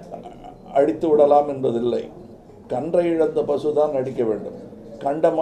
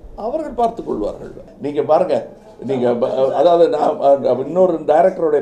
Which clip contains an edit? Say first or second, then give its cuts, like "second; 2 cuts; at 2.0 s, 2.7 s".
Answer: second; 1 cut; at 1.4 s